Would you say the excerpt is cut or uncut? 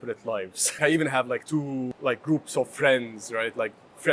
cut